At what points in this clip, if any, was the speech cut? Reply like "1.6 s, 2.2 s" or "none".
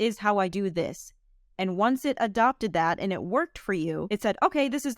4.1 s

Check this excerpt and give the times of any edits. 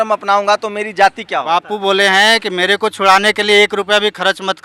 1.5 s

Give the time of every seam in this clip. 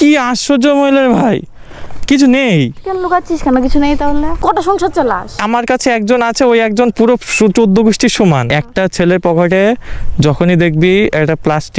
4.3 s, 5.4 s, 8.5 s

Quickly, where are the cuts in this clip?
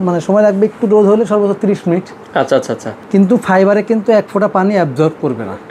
none

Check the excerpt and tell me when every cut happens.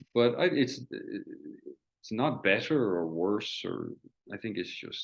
4.1 s

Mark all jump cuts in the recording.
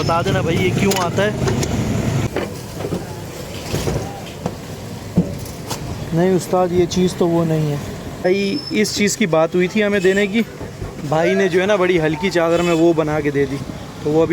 2.3 s, 8.2 s

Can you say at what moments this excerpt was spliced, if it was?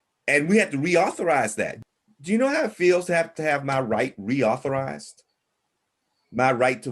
1.7 s, 3.3 s

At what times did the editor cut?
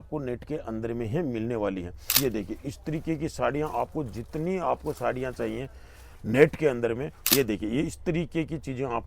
2.1 s, 7.3 s

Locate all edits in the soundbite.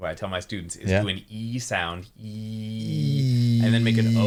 none

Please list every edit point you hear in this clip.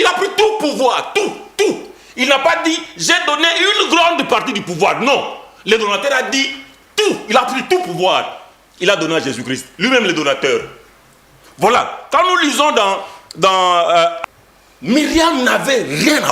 14.2 s

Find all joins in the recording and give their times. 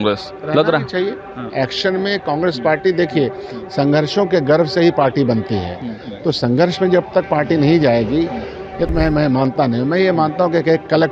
8.9 s

